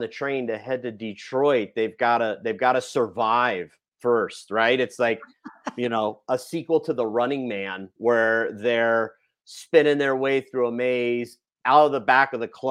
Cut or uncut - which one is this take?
uncut